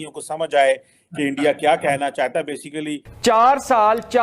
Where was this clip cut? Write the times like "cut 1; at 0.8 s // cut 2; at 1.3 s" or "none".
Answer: cut 1; at 3.0 s